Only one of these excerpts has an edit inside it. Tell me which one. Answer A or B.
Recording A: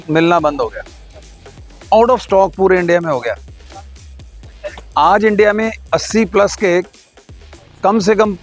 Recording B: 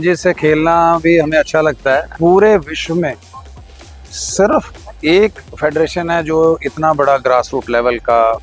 B